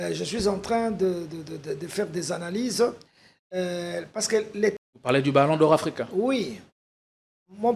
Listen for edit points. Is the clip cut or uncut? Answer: cut